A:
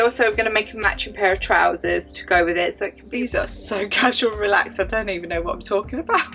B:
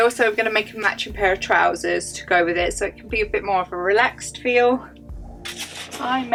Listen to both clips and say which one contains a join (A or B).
A